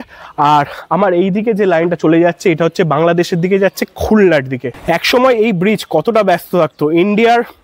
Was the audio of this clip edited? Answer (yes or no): yes